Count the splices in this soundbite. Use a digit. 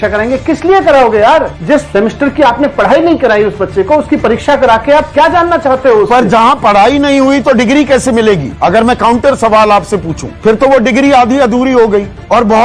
2